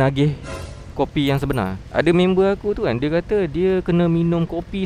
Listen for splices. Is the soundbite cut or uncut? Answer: cut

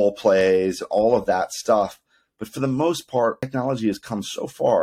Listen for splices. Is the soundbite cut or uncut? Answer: cut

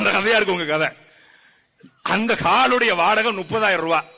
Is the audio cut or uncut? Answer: uncut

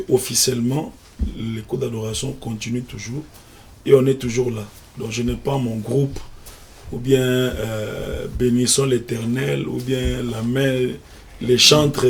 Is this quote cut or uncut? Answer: uncut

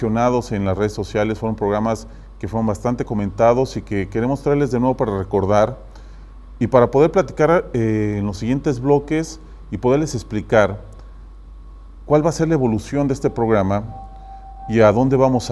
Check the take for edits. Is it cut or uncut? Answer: uncut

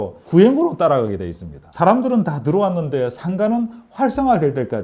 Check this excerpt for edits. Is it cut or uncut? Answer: uncut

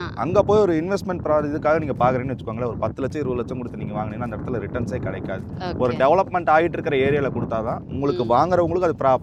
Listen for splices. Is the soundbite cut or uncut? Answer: uncut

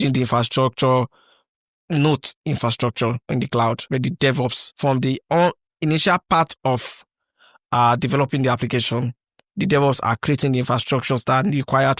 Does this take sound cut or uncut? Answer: cut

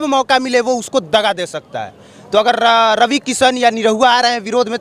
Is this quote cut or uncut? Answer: uncut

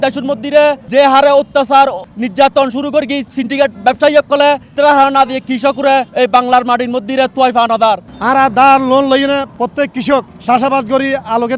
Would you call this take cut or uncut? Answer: cut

